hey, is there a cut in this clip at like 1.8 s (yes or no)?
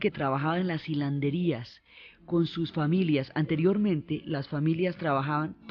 no